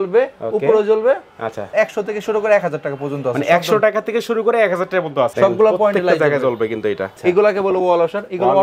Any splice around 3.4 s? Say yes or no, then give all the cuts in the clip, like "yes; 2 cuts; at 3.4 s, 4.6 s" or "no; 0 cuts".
no; 3 cuts; at 1.6 s, 5.3 s, 7.1 s